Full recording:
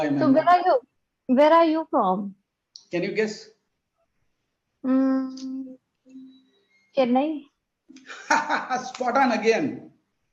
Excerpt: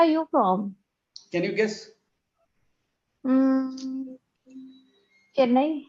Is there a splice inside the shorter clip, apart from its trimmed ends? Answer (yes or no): no